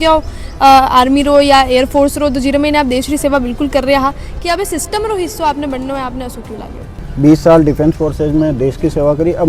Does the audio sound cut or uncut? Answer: cut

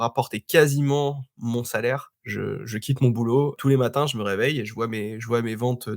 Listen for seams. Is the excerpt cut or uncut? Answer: cut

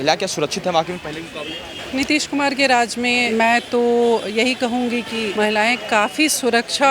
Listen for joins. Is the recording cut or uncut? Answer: cut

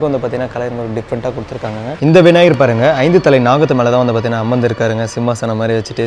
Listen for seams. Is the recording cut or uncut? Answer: cut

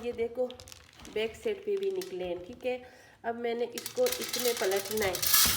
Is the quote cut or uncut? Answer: uncut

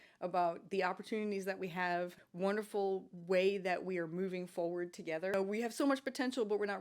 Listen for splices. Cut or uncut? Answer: cut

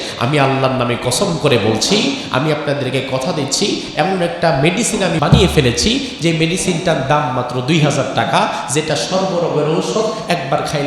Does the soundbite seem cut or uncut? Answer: cut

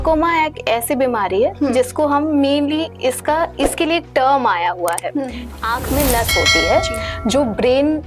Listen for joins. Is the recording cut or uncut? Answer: cut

